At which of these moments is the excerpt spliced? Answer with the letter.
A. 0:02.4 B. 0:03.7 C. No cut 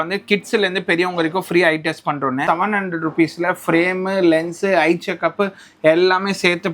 A